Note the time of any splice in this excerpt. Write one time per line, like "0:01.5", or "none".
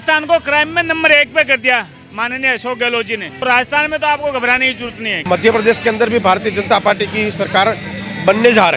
0:03.4
0:05.2